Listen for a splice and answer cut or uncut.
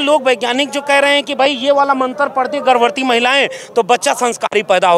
uncut